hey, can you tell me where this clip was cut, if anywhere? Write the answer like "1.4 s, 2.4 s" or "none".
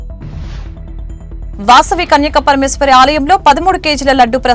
none